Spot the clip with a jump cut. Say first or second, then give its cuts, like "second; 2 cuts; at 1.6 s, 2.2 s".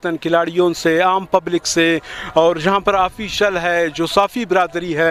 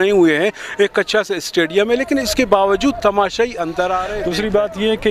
second; 1 cut; at 4.2 s